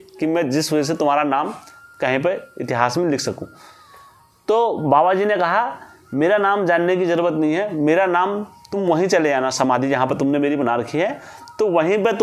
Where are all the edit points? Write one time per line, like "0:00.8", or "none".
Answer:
none